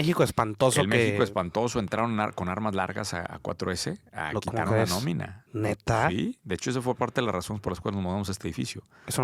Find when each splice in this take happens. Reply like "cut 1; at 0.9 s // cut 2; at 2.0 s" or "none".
none